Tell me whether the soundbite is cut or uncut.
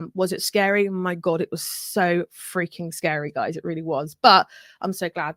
uncut